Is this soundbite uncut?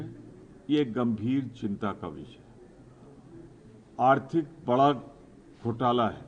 yes; 0 cuts

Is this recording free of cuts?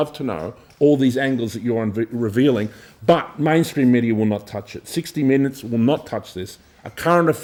yes; 0 cuts

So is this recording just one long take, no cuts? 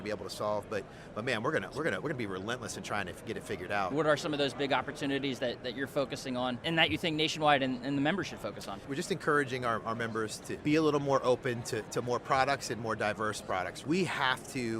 no; 5 cuts; at 3.9 s, 6.6 s, 8.8 s, 10.6 s, 13.8 s

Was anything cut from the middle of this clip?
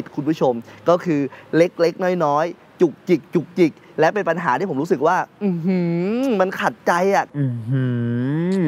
yes; 1 cut; at 3.8 s

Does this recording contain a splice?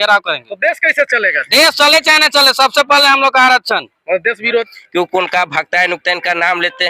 yes; 1 cut; at 4.7 s

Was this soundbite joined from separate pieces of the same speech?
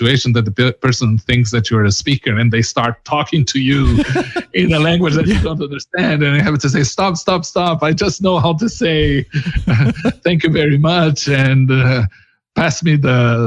no; 0 cuts

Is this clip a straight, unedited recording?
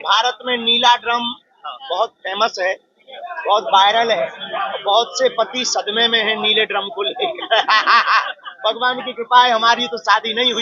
yes; 0 cuts

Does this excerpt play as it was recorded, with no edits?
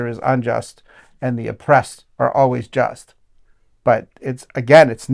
yes; 0 cuts

